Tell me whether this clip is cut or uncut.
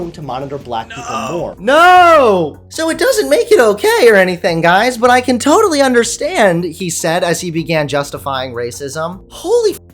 cut